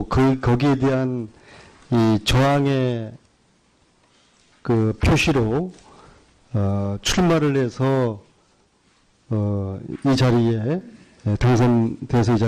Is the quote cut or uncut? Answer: uncut